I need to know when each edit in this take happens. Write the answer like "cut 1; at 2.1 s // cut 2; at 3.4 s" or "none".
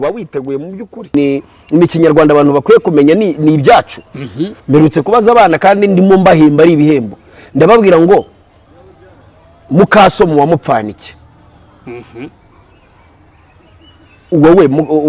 cut 1; at 1.1 s